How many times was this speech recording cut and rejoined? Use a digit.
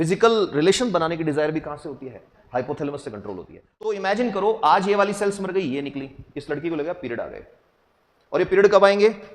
1